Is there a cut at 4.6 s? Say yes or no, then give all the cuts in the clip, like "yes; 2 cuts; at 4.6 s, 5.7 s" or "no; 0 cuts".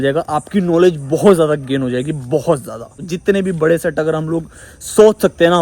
no; 1 cut; at 2.9 s